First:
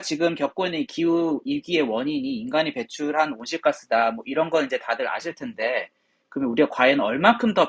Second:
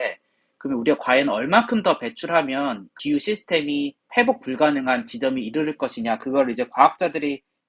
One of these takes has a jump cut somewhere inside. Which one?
second; 2 cuts; at 2.9 s, 4.0 s

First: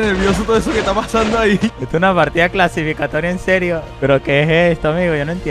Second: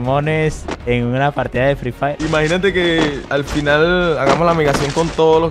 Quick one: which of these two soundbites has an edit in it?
first; 2 cuts; at 1.8 s, 3.9 s

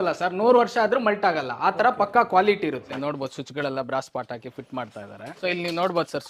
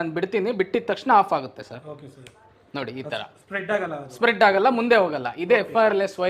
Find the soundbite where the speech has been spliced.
first; 2 cuts; at 2.9 s, 5.3 s

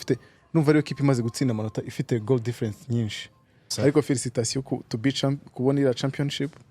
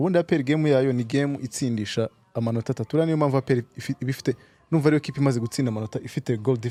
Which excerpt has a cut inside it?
first; 1 cut; at 3.6 s

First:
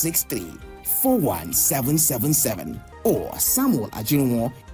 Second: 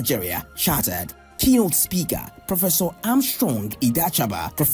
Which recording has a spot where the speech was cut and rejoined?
second; 1 cut; at 1.6 s

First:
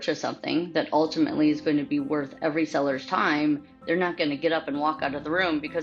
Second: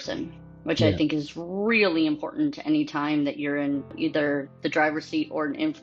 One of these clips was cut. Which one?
second; 1 cut; at 3.9 s

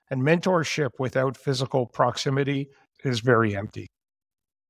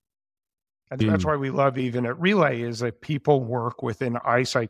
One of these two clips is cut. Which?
second; 1 cut; at 1.8 s

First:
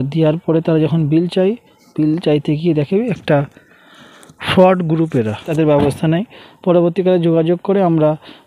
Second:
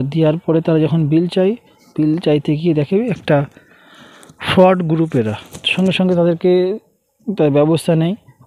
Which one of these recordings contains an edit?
first; 1 cut; at 5.5 s

